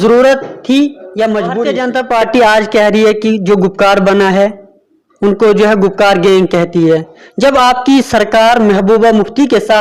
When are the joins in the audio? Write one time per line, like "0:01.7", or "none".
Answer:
0:01.7